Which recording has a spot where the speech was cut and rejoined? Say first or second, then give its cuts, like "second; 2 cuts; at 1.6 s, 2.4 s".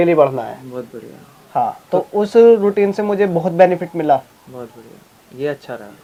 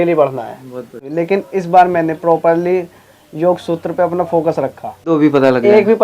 second; 2 cuts; at 1.1 s, 5.1 s